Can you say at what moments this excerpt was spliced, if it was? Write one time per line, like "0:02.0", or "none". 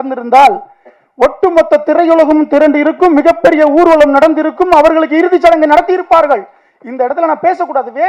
none